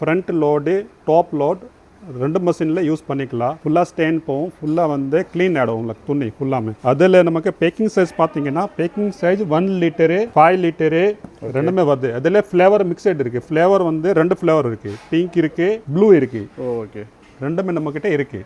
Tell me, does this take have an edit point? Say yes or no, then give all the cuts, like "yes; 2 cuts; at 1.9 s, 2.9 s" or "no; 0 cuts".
no; 0 cuts